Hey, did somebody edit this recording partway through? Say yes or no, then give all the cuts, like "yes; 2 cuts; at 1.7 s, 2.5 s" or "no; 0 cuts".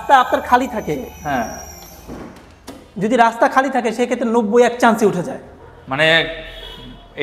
no; 0 cuts